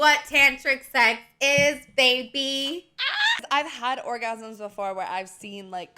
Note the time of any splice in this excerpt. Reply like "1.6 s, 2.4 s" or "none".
3.4 s